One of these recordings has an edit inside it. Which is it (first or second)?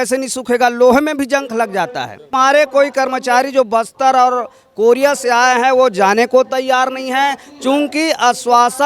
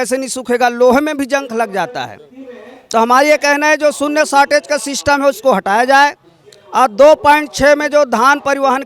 first